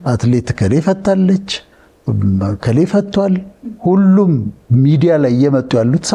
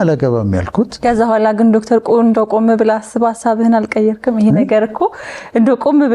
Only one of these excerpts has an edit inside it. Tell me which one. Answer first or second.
second